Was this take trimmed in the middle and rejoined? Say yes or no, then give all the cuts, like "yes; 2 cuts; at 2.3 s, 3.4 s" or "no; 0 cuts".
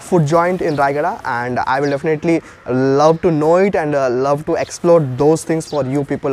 no; 0 cuts